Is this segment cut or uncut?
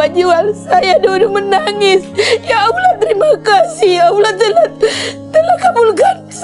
uncut